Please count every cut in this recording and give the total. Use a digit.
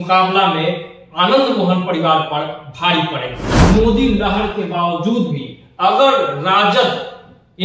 1